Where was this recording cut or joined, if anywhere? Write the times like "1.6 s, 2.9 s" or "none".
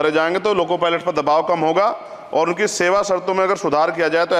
none